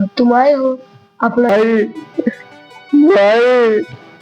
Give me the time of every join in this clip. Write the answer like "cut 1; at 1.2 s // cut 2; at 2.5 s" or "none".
cut 1; at 1.5 s